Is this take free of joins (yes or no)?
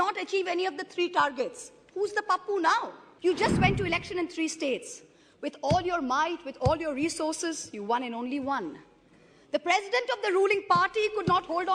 no